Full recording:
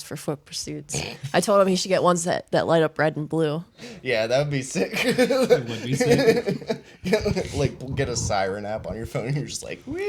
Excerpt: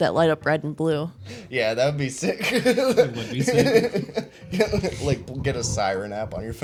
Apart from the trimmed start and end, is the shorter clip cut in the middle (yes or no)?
no